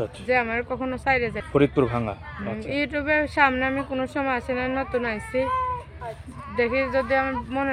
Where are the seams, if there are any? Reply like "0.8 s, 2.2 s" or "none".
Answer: 1.4 s